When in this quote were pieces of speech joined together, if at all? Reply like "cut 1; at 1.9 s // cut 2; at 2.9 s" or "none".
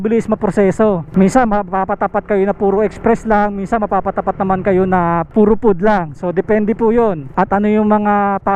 cut 1; at 1.0 s // cut 2; at 5.3 s // cut 3; at 7.3 s

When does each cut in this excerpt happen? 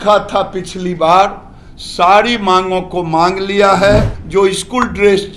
cut 1; at 4.2 s

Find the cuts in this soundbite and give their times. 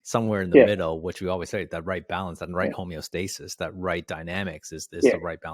none

